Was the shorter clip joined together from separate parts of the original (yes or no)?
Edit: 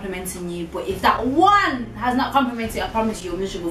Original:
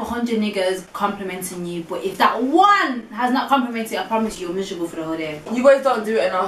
no